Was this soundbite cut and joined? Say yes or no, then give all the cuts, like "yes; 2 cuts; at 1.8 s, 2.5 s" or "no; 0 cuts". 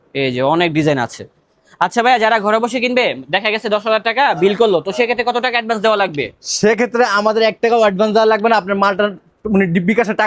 no; 0 cuts